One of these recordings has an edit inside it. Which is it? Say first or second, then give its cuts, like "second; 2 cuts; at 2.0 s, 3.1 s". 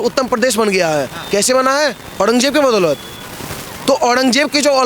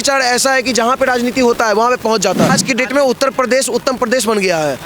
second; 1 cut; at 2.6 s